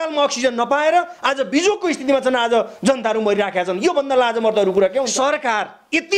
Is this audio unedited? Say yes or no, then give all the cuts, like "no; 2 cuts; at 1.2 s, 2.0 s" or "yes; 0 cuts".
no; 1 cut; at 5.1 s